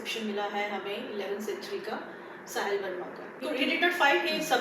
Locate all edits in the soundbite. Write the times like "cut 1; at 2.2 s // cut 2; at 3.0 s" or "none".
cut 1; at 3.4 s